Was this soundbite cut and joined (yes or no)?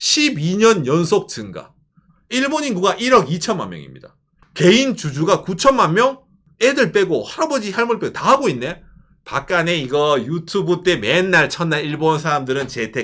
yes